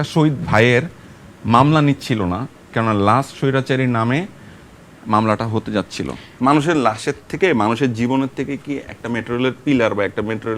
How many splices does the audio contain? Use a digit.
1